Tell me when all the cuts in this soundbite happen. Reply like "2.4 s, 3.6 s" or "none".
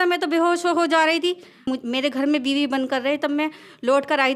1.6 s